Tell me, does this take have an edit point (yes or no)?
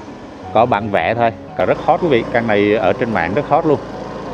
yes